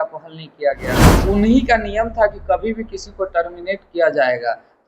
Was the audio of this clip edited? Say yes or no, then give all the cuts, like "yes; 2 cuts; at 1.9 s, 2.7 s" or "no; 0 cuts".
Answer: yes; 1 cut; at 1.1 s